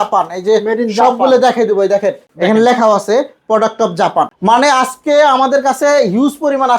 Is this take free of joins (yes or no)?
no